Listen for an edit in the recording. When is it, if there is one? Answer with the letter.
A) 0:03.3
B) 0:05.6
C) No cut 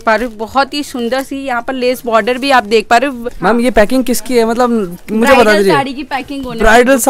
A